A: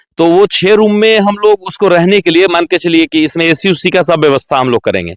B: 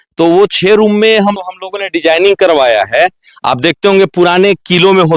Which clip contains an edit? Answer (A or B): B